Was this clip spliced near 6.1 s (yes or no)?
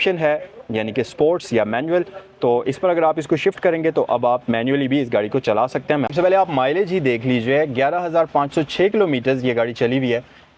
yes